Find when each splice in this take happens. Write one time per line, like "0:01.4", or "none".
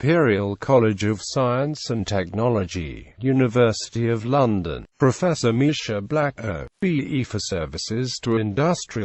none